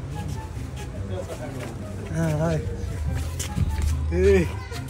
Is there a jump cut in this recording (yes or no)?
no